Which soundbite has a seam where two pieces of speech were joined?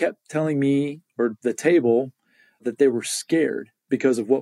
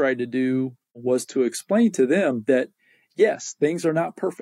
second; 1 cut; at 1.0 s

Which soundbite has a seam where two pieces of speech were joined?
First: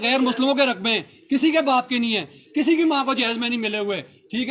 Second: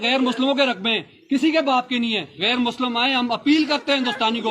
second; 1 cut; at 2.3 s

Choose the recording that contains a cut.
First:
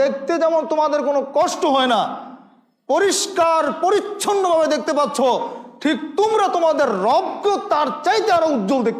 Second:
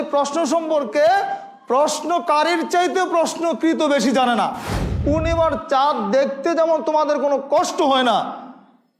second; 1 cut; at 5.0 s

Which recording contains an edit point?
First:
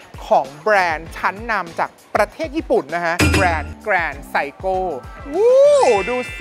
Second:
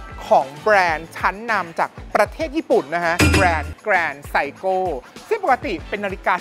first; 1 cut; at 5.1 s

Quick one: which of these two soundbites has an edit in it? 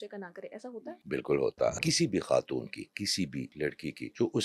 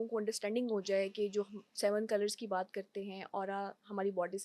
first; 3 cuts; at 1.0 s, 1.7 s, 3.6 s

